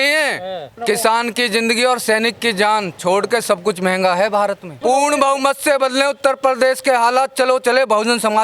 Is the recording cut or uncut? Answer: cut